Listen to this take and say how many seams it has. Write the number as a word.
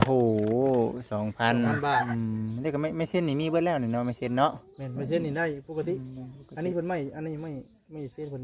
one